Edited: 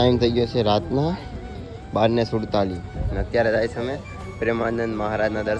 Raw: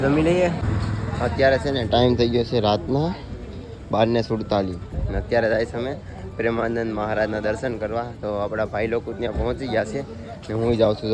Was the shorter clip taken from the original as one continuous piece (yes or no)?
yes